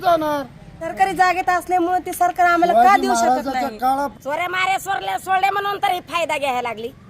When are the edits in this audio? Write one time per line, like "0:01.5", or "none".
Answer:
0:00.9
0:04.2